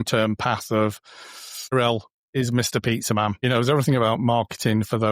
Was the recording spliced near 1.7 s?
yes; 2 cuts; at 1.7 s, 3.4 s

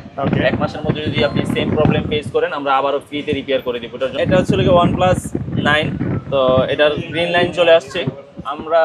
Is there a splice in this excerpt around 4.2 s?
yes; 1 cut; at 4.2 s

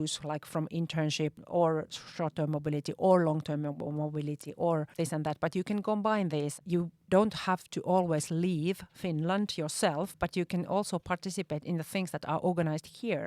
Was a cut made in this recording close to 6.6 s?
yes; 3 cuts; at 1.4 s, 4.9 s, 6.6 s

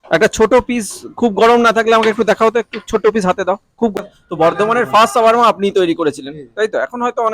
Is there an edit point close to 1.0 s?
no; 1 cut; at 3.9 s

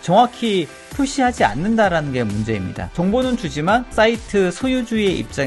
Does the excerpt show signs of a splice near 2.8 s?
yes; 1 cut; at 2.8 s

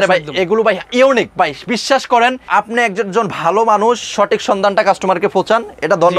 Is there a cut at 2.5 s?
yes; 1 cut; at 2.5 s

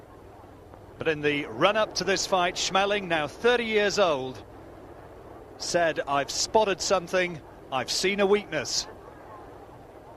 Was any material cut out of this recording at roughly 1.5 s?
yes; 1 cut; at 1.5 s

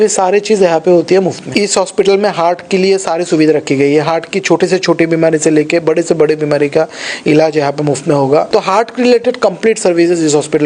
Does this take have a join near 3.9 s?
no; 2 cuts; at 1.4 s, 8.5 s

